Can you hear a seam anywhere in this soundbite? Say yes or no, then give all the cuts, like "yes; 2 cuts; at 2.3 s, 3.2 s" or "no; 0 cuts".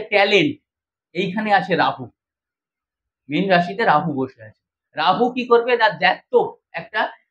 no; 0 cuts